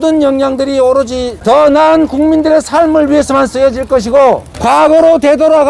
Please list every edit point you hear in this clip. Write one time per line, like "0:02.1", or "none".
none